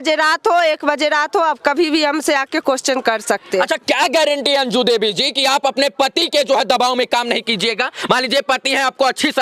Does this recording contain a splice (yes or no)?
no